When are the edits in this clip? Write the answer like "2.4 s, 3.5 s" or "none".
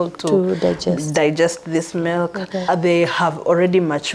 2.6 s